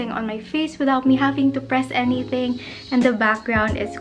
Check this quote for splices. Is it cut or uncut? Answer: uncut